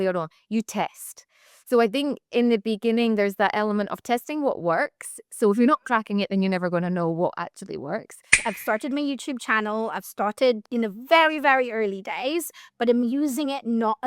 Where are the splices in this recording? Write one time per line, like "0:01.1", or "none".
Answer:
0:08.4
0:10.6